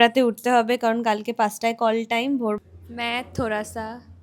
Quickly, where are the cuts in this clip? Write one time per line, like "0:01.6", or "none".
0:02.6